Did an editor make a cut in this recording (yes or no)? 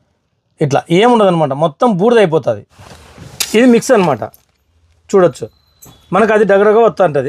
yes